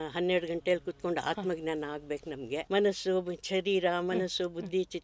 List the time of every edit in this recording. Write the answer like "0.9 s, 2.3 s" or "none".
2.6 s